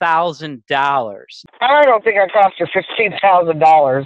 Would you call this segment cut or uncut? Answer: cut